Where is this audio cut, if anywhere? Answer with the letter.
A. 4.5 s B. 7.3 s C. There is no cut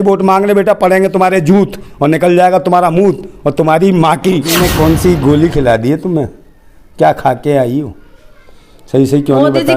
A